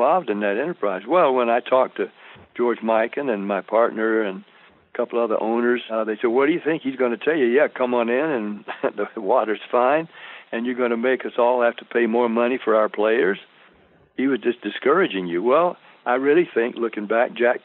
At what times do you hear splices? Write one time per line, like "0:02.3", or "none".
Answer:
0:05.9

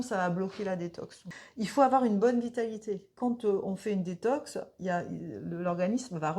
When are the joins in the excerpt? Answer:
0:01.4
0:03.2

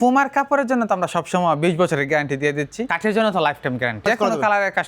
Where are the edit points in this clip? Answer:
0:02.9
0:04.0

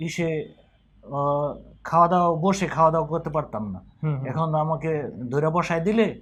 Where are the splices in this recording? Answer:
none

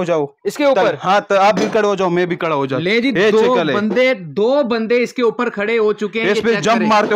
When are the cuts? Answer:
none

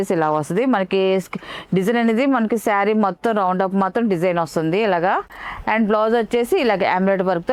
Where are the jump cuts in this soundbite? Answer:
none

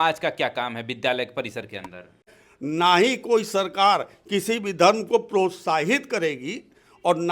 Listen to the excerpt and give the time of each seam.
0:02.4

